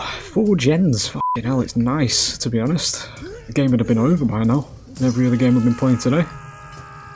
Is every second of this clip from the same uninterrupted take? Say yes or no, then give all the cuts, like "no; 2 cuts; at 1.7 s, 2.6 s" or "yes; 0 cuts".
yes; 0 cuts